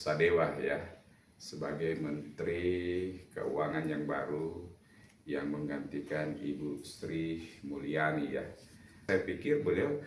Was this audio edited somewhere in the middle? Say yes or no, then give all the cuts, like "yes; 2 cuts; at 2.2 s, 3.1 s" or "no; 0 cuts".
yes; 1 cut; at 9.0 s